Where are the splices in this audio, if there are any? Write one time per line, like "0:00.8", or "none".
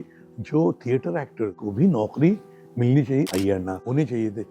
0:01.6
0:03.2